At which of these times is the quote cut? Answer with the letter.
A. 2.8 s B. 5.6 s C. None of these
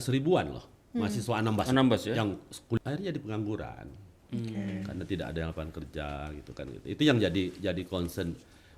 A